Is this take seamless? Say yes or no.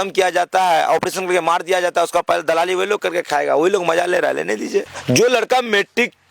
no